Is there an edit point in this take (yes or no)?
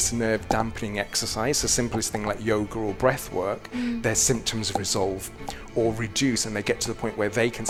no